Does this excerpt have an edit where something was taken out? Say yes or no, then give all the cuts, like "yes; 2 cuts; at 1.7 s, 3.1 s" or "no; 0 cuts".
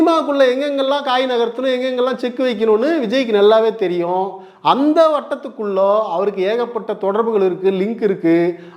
no; 0 cuts